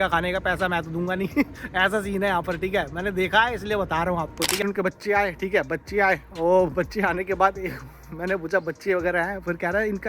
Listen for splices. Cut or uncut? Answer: cut